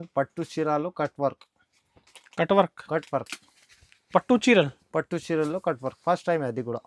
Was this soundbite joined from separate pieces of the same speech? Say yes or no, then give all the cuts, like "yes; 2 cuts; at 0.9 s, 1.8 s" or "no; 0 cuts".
no; 0 cuts